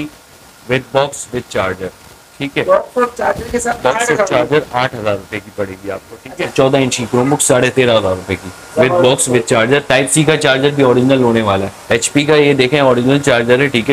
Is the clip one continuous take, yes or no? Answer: no